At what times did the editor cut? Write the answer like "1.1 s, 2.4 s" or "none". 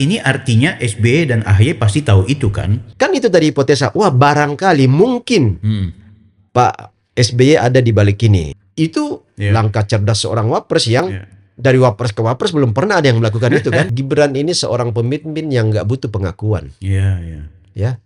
2.8 s, 8.5 s, 13.9 s